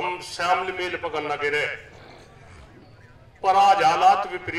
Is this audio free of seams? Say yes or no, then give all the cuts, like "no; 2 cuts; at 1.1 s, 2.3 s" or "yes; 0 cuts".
yes; 0 cuts